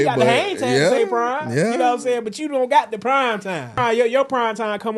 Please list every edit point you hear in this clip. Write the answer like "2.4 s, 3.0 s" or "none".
3.8 s